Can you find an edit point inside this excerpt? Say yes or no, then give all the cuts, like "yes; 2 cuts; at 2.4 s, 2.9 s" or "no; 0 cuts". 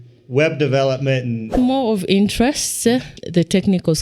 yes; 2 cuts; at 1.5 s, 3.2 s